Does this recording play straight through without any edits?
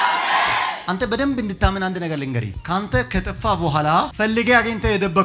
no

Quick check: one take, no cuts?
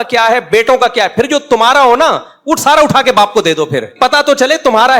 no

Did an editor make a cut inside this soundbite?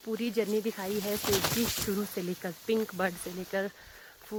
no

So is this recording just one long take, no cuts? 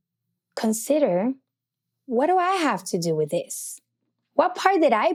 yes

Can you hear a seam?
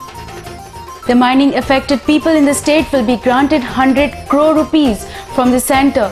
yes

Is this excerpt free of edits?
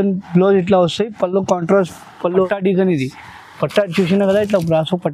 no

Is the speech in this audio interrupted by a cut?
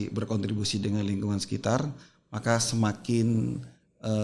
no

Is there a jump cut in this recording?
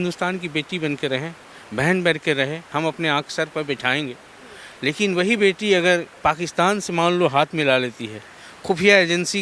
no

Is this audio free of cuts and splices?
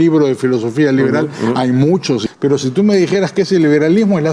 no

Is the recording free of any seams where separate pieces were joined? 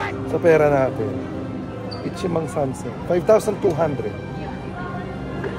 yes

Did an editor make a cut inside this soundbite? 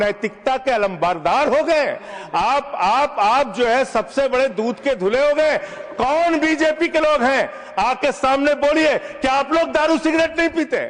no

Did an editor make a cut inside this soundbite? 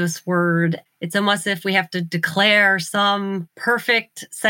yes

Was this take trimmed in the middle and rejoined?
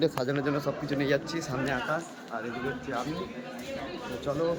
no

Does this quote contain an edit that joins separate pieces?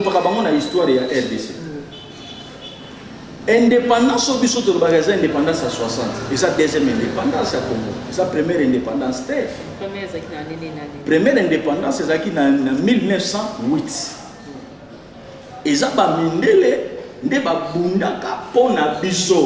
no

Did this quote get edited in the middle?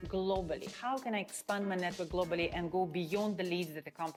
no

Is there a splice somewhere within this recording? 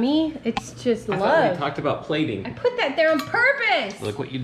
yes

